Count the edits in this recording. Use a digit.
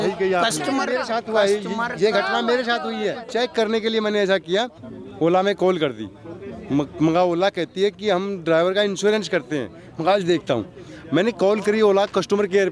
3